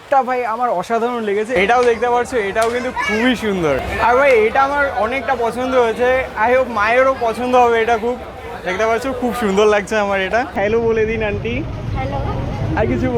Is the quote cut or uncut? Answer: cut